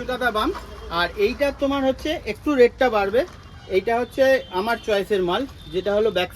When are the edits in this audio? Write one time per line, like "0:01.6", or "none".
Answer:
none